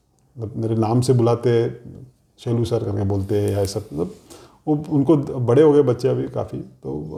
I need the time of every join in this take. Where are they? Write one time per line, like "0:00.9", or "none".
none